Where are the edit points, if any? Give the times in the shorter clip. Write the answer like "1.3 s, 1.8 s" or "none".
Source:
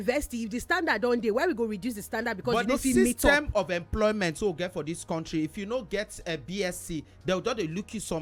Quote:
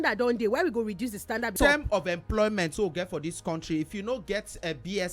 1.5 s